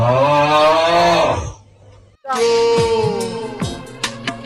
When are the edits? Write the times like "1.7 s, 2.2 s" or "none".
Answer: 2.3 s